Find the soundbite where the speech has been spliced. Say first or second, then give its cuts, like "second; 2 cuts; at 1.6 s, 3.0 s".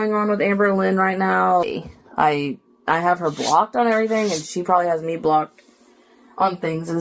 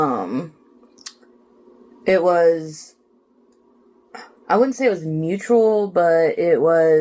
first; 1 cut; at 1.6 s